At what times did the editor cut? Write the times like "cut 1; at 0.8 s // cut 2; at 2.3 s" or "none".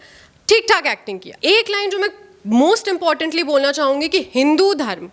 cut 1; at 1.3 s